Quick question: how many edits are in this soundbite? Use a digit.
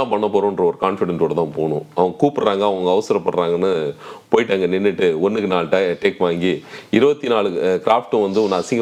0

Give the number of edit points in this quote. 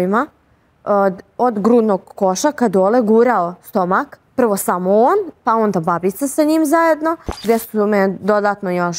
2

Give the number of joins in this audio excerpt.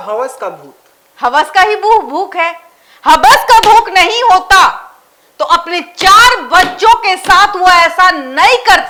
0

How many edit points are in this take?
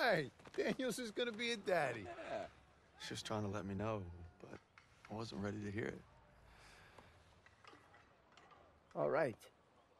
0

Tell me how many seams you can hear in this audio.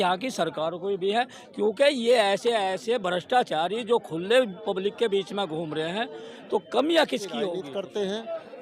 1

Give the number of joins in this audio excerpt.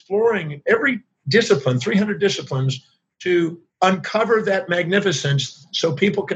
2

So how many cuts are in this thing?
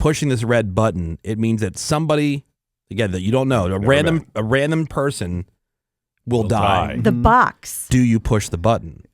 1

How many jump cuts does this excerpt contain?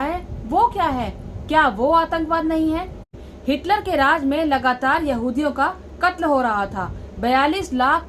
1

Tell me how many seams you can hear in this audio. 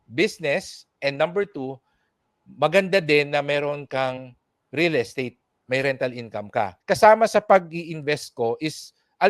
1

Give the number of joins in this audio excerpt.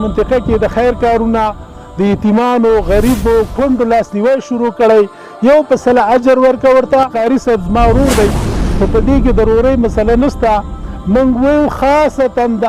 1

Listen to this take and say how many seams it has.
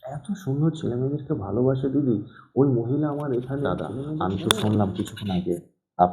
1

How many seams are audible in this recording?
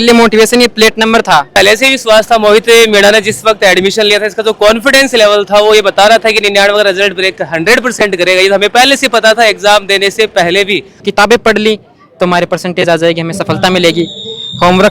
2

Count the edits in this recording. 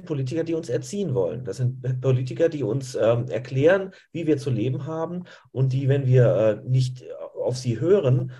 0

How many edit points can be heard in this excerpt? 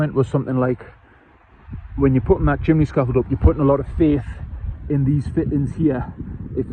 0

